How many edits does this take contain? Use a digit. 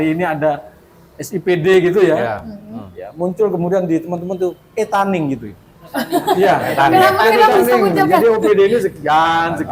0